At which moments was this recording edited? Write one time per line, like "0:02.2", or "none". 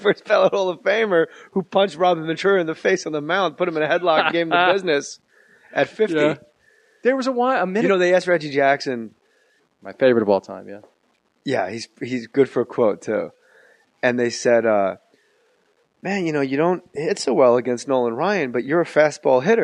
none